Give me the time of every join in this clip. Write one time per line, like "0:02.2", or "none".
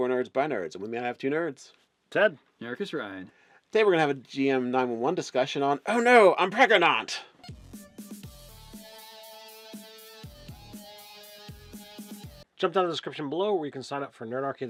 none